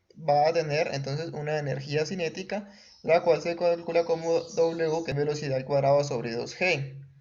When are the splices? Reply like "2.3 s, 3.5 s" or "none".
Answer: 5.1 s